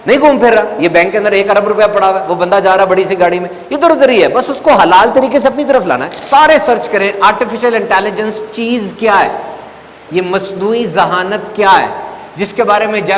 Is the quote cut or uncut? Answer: cut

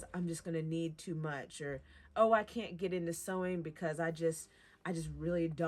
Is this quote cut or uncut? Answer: cut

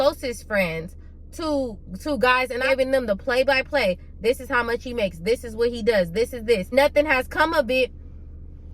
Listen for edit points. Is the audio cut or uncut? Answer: cut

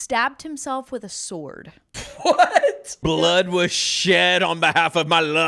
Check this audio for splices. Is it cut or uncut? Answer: cut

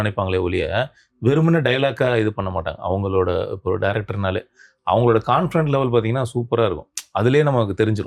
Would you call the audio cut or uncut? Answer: uncut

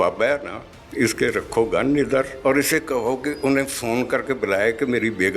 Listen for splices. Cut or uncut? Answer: cut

